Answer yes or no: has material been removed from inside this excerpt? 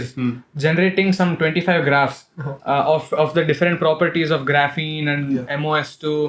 no